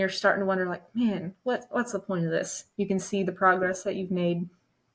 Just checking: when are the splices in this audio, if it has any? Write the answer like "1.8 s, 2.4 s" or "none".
none